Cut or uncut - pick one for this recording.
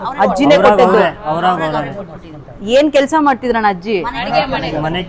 uncut